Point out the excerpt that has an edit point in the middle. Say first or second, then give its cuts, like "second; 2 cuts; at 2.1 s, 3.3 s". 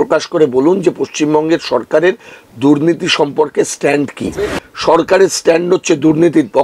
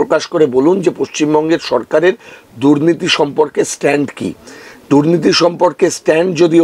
first; 1 cut; at 4.7 s